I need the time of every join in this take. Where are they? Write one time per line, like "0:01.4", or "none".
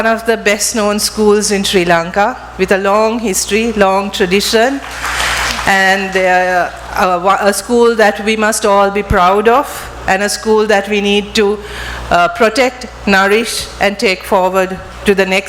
none